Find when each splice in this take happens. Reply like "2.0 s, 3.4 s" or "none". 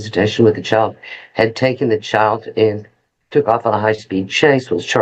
none